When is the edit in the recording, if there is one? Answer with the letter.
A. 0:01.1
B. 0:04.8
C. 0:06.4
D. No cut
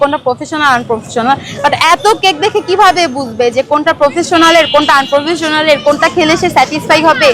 D